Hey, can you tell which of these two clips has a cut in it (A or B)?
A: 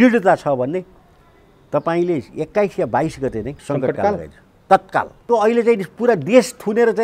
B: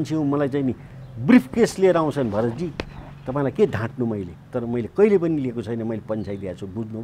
A